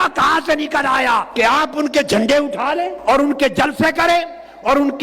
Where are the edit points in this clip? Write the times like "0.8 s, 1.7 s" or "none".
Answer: 1.3 s, 3.0 s